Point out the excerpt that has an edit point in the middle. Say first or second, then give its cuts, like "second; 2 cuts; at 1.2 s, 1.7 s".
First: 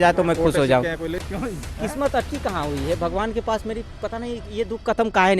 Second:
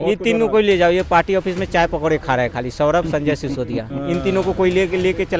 first; 1 cut; at 1.2 s